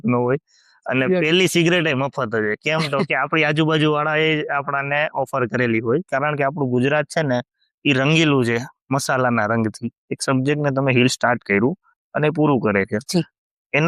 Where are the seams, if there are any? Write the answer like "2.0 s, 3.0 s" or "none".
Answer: 6.1 s, 9.9 s